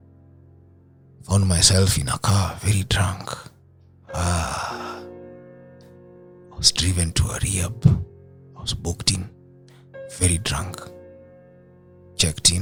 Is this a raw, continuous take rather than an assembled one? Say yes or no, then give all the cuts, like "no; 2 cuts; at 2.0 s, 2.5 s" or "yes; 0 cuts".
yes; 0 cuts